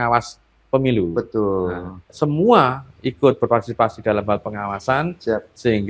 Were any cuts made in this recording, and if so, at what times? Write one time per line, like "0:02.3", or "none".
0:02.1